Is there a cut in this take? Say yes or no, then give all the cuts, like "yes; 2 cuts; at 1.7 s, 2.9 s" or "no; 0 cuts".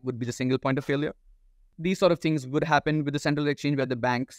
yes; 1 cut; at 1.7 s